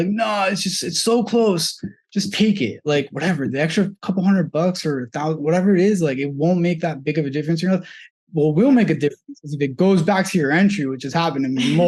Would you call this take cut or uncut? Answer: uncut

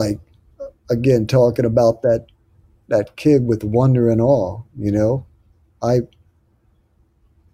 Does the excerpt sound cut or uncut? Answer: uncut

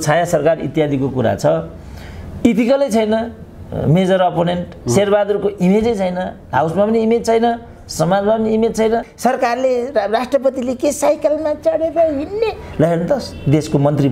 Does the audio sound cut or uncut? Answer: cut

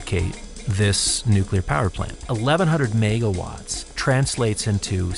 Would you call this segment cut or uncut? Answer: cut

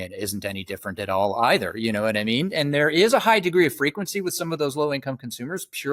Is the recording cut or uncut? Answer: uncut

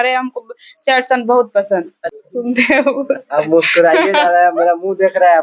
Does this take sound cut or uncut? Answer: cut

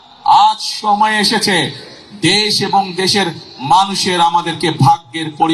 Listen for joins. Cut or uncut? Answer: uncut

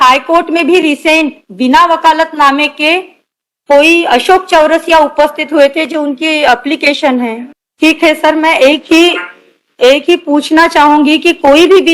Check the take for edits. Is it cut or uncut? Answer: uncut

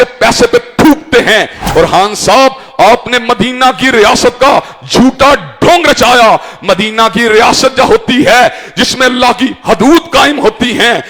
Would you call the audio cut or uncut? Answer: cut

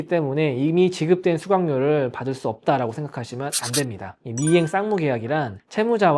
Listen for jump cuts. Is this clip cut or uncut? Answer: uncut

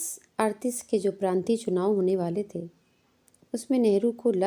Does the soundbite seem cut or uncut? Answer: uncut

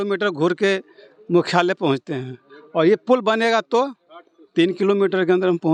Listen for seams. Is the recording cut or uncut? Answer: uncut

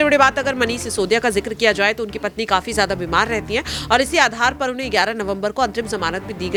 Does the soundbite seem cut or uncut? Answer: uncut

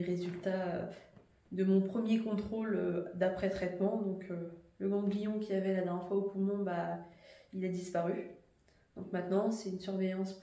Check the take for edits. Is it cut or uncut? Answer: uncut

